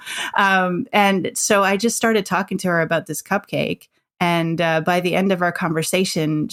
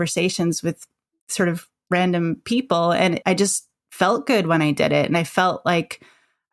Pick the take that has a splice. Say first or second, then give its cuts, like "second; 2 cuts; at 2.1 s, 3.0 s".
second; 1 cut; at 3.2 s